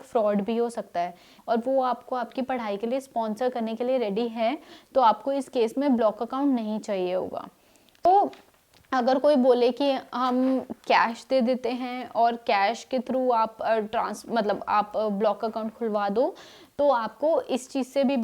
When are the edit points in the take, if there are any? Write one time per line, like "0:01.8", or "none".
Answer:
0:01.3
0:08.0